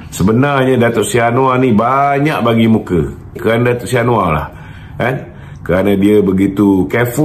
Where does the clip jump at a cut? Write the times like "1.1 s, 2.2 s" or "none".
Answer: 3.4 s

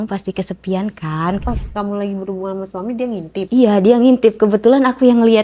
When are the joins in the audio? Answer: 1.4 s, 3.5 s

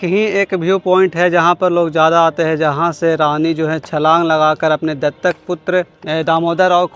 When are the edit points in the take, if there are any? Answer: none

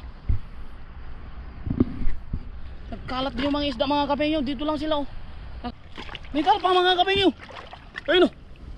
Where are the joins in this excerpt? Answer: 5.7 s

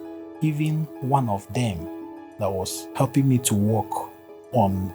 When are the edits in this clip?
2.8 s

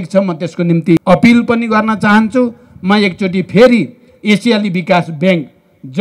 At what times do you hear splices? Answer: 1.0 s

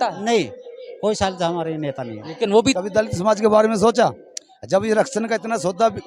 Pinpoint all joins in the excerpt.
2.7 s

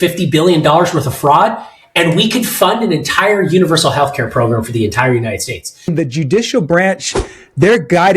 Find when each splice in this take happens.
5.9 s

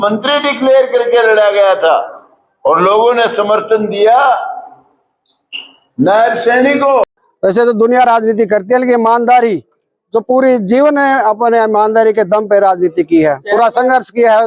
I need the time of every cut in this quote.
7.0 s

